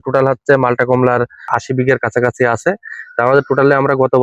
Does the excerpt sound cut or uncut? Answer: cut